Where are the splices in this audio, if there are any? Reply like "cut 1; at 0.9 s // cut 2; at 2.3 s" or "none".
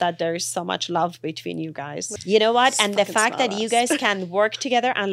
cut 1; at 2.0 s